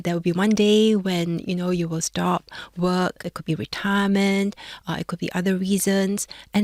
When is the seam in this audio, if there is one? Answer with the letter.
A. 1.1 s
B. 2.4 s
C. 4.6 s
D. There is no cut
D